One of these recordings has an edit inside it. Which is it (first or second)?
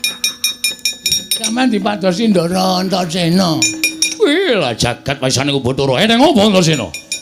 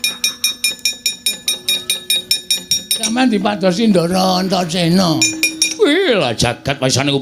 first